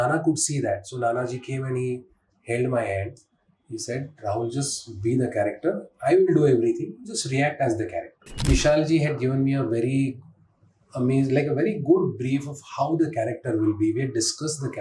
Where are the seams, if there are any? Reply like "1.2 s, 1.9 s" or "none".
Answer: 8.5 s